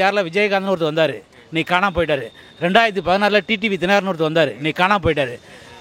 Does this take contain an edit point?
no; 0 cuts

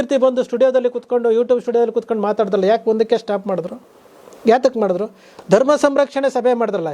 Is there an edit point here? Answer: no; 0 cuts

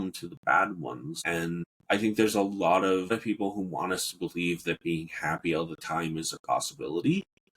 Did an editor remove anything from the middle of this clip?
yes; 2 cuts; at 1.4 s, 3.1 s

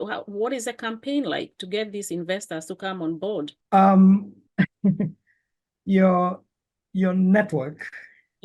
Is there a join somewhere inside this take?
yes; 2 cuts; at 3.6 s, 4.4 s

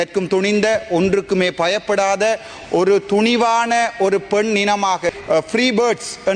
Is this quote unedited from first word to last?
no; 1 cut; at 5.1 s

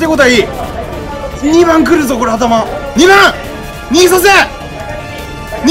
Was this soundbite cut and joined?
yes; 2 cuts; at 1.3 s, 2.8 s

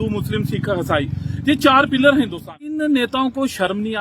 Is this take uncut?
no; 1 cut; at 2.6 s

